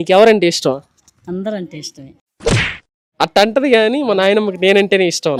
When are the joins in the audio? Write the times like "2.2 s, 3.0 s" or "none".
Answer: none

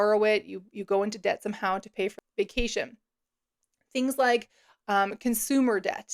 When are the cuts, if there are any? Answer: 2.1 s

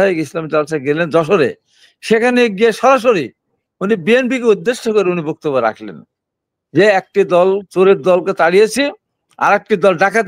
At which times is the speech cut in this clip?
none

